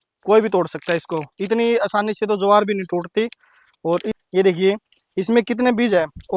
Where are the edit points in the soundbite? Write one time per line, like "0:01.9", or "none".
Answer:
0:04.1